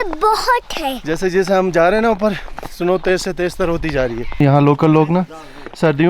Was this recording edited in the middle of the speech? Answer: yes; 2 cuts; at 1.0 s, 4.4 s

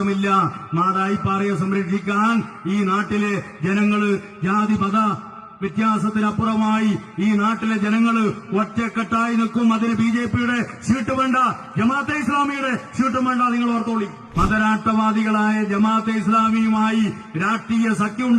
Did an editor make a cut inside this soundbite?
yes; 1 cut; at 14.2 s

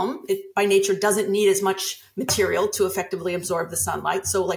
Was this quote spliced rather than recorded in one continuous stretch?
no; 0 cuts

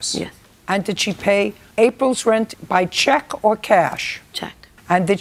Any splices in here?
no; 0 cuts

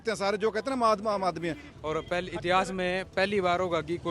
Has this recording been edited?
yes; 1 cut; at 1.6 s

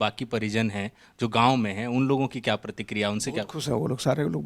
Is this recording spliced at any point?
no; 0 cuts

